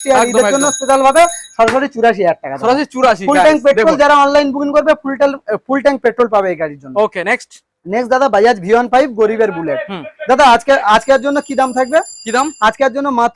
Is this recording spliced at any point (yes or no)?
no